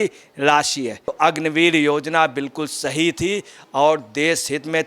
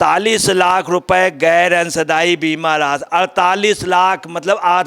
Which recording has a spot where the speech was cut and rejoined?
first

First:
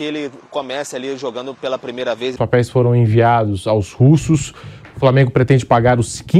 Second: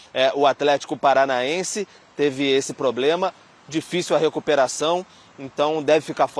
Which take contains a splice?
first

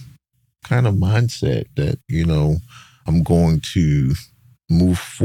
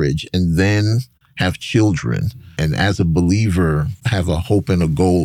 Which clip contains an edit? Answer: second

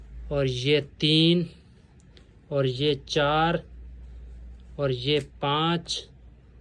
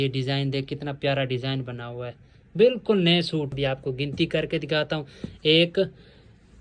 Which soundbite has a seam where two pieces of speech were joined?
second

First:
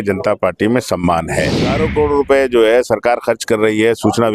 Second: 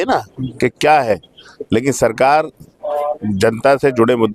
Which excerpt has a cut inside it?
first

